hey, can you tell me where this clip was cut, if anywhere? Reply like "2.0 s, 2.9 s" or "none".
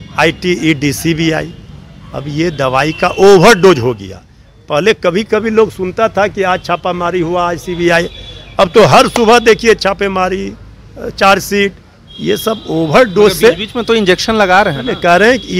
none